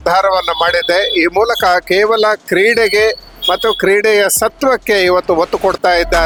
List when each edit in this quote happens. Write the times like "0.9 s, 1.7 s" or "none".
none